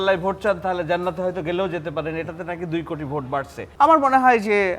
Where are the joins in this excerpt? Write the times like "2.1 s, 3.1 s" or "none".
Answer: 3.6 s